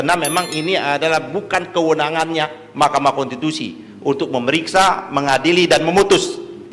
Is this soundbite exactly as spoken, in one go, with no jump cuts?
yes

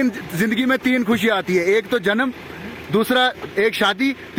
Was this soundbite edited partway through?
no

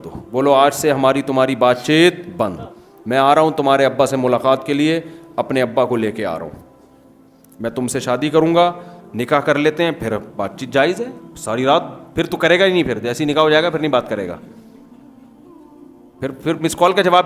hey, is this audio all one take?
no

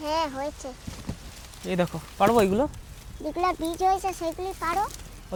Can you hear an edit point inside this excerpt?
no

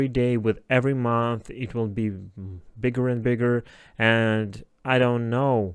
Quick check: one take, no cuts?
yes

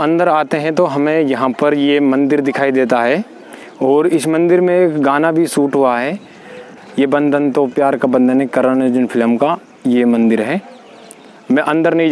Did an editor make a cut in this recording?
no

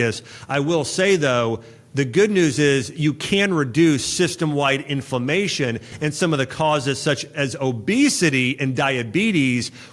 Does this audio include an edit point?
no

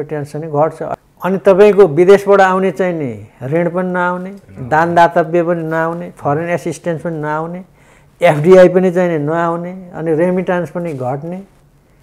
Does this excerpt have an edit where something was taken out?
yes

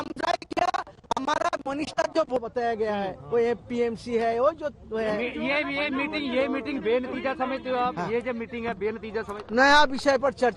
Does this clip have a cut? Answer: yes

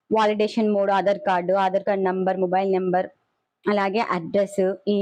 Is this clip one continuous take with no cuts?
yes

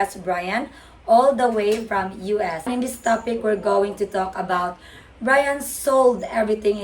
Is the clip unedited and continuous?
no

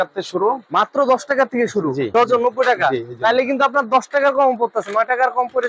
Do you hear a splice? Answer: yes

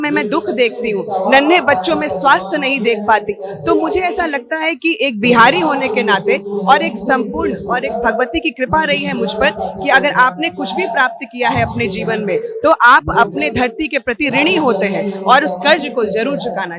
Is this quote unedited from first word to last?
yes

